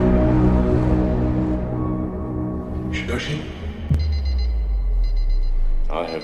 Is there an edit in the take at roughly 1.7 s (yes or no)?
yes